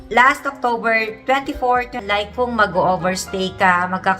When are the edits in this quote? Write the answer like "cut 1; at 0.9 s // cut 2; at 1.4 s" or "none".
cut 1; at 2.0 s

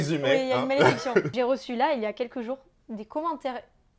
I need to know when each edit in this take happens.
cut 1; at 1.3 s

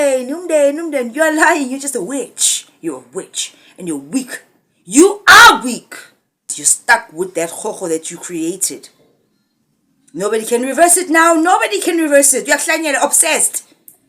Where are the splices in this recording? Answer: cut 1; at 6.6 s

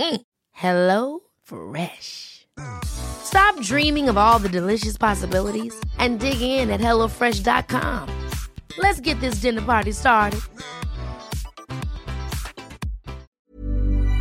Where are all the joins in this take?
cut 1; at 13.3 s

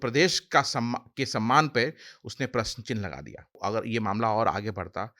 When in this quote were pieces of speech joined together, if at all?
cut 1; at 3.6 s

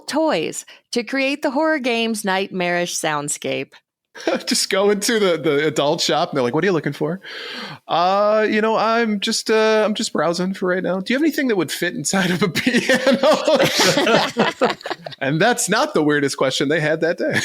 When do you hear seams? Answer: cut 1; at 4.1 s

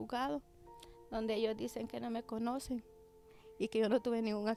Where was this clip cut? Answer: none

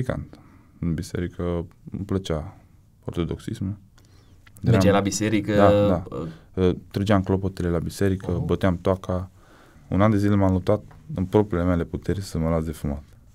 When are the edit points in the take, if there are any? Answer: cut 1; at 9.7 s

